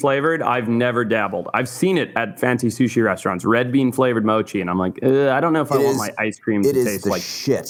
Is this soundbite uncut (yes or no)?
yes